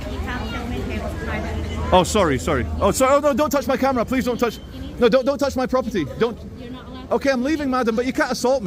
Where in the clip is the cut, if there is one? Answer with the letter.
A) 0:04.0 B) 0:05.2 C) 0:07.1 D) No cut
D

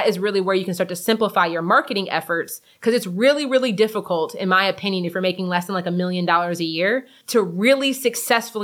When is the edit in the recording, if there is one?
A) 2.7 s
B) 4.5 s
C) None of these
C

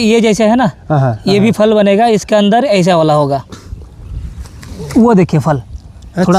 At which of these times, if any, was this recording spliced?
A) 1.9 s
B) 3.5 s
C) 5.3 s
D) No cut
B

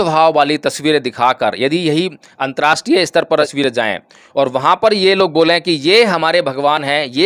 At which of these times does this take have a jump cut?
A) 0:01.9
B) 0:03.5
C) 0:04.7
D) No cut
B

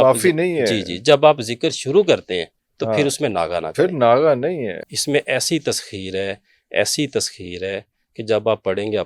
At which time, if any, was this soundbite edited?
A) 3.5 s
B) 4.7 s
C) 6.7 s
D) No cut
B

